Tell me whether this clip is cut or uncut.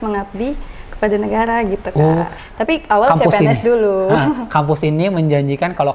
cut